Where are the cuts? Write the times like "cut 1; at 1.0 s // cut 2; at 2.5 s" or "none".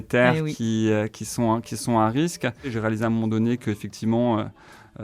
cut 1; at 2.8 s